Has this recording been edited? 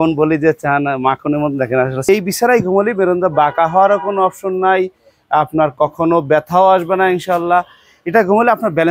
yes; 1 cut; at 2.1 s

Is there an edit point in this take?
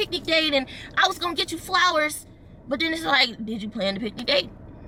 no; 0 cuts

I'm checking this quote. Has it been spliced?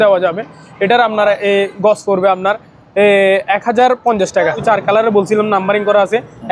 yes; 1 cut; at 4.6 s

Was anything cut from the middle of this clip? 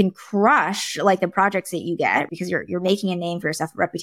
yes; 1 cut; at 2.3 s

